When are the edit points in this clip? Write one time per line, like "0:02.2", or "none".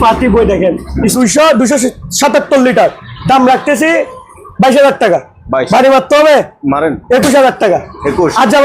0:01.1